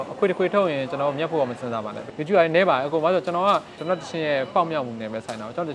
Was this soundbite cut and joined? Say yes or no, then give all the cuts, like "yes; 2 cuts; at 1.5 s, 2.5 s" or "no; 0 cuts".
yes; 1 cut; at 2.0 s